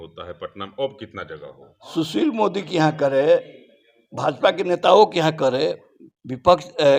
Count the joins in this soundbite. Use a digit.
0